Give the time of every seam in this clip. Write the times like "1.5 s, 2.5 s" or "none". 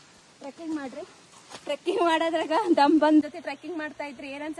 3.2 s

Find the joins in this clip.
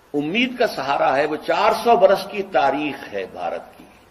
none

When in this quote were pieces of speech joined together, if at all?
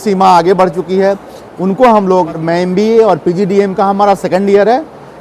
2.4 s

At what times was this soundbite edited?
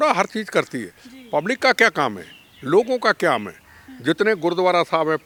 none

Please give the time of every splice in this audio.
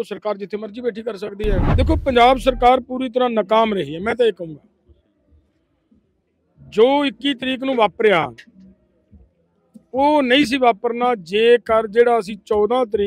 1.7 s

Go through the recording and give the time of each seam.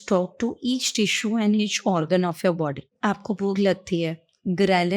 2.9 s

